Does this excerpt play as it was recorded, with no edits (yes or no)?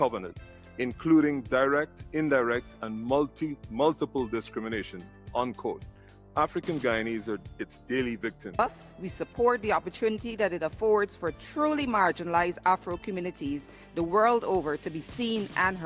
no